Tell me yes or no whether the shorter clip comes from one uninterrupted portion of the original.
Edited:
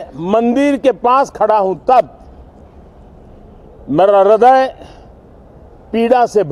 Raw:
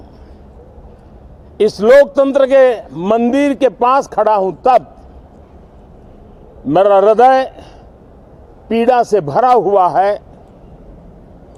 yes